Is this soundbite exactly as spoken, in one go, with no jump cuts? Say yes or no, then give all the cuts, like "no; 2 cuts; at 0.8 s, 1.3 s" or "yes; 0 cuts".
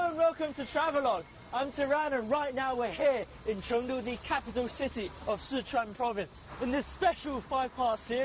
yes; 0 cuts